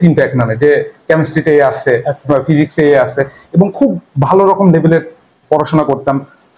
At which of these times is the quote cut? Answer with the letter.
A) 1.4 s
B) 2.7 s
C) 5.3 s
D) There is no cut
D